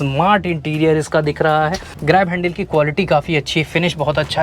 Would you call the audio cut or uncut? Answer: cut